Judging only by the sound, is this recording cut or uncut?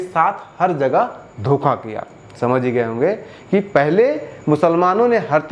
uncut